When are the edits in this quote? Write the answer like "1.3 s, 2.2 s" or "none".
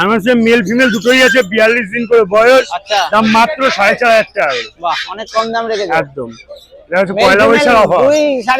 none